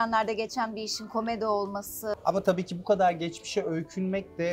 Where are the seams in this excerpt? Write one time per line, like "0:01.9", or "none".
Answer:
0:02.2